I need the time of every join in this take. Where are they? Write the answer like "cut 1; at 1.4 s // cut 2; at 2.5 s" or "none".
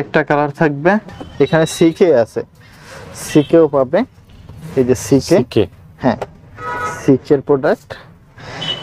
cut 1; at 1.1 s